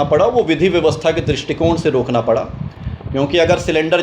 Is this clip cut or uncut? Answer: uncut